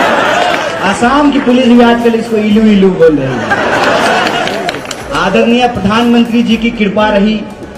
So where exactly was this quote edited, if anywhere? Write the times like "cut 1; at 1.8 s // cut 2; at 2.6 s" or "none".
none